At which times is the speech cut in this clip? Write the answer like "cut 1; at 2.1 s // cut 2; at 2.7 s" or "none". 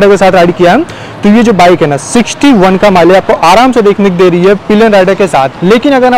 none